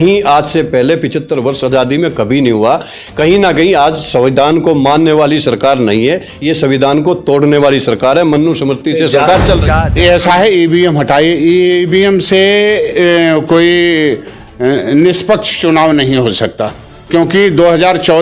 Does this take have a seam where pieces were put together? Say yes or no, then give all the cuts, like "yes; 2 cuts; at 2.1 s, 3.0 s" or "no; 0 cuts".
yes; 1 cut; at 9.7 s